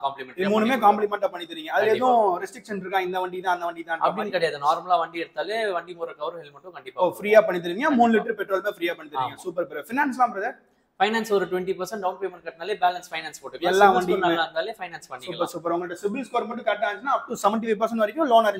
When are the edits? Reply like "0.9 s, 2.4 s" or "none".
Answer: none